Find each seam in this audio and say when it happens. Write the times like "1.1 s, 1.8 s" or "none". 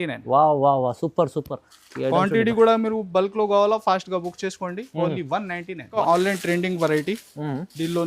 6.0 s